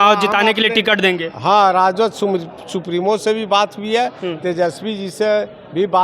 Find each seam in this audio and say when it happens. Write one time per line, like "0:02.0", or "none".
none